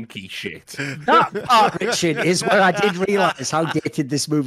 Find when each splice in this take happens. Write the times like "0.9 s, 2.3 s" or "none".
1.0 s